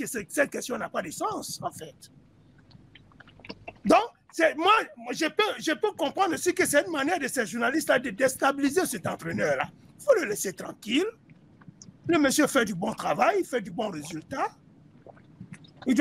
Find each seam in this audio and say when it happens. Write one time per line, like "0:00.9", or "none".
none